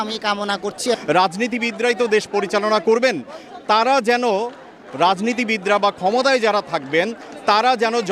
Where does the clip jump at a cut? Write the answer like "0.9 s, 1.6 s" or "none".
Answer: 1.0 s